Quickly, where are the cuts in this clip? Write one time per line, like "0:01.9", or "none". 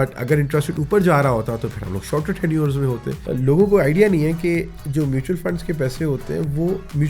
0:03.1